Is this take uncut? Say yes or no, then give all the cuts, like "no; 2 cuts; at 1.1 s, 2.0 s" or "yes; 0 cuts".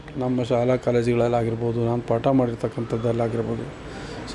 yes; 0 cuts